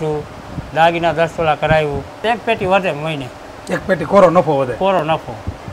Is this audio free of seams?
no; 1 cut; at 2.2 s

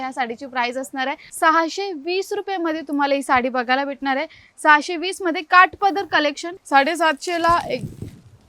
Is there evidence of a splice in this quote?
yes; 2 cuts; at 1.3 s, 6.5 s

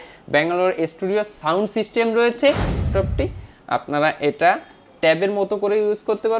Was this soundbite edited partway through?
yes; 1 cut; at 2.8 s

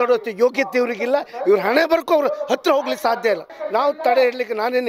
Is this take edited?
yes; 1 cut; at 3.6 s

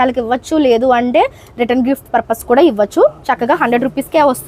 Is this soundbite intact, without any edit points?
yes; 0 cuts

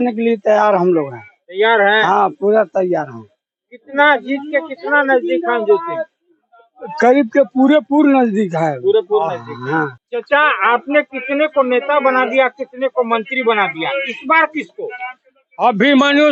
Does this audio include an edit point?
no; 0 cuts

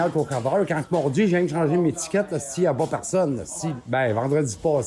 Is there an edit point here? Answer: yes; 1 cut; at 3.7 s

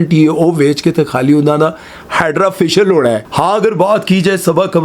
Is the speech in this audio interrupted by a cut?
yes; 1 cut; at 3.3 s

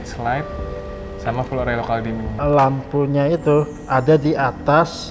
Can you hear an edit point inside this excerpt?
yes; 1 cut; at 2.4 s

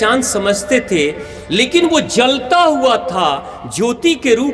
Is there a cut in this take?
no; 0 cuts

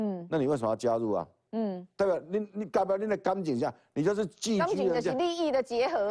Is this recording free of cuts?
yes; 0 cuts

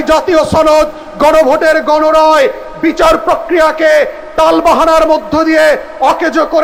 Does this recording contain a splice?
no; 0 cuts

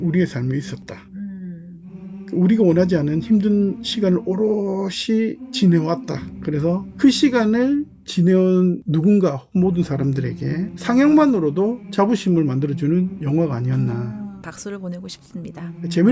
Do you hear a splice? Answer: no; 0 cuts

